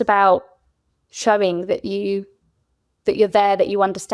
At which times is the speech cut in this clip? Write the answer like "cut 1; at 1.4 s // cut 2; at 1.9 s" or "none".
none

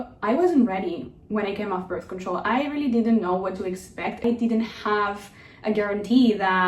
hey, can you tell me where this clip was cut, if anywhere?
cut 1; at 4.2 s

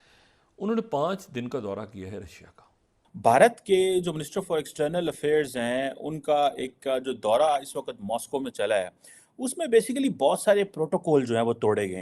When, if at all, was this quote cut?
cut 1; at 3.2 s

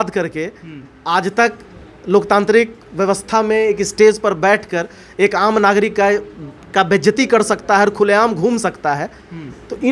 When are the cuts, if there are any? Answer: none

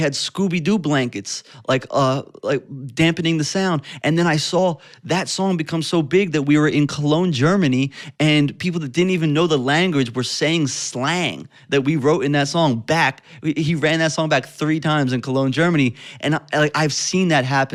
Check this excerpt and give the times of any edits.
none

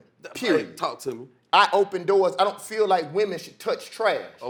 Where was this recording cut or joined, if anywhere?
none

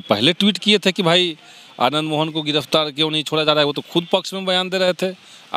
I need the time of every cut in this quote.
none

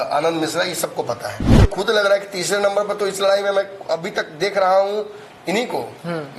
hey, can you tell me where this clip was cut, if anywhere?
cut 1; at 1.5 s

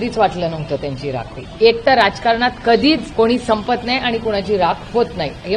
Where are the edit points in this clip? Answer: cut 1; at 1.5 s // cut 2; at 3.1 s

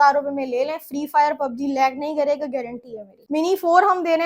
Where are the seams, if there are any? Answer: cut 1; at 3.1 s

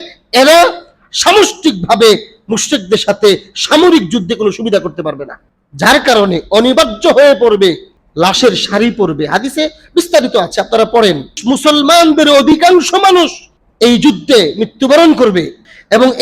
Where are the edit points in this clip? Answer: cut 1; at 11.4 s

